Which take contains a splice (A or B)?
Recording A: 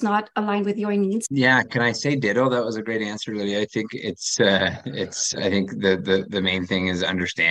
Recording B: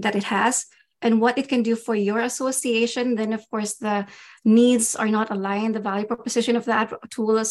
A